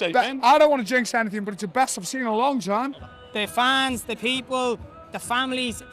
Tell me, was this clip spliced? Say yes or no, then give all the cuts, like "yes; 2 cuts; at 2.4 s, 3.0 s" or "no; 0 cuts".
yes; 1 cut; at 3.0 s